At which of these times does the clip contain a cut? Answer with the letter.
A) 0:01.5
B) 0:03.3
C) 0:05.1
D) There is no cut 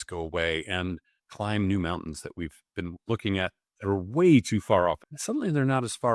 C